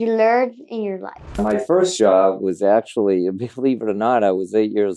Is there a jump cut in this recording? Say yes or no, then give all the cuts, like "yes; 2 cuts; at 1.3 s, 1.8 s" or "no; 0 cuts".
yes; 1 cut; at 1.3 s